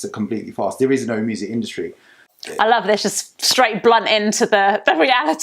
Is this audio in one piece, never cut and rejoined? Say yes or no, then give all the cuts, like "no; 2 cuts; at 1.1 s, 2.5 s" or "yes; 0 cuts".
no; 1 cut; at 2.3 s